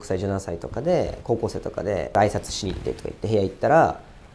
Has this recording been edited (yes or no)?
yes